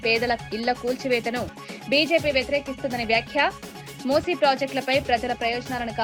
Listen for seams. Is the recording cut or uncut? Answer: uncut